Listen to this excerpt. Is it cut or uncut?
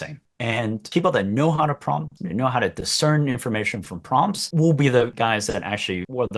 cut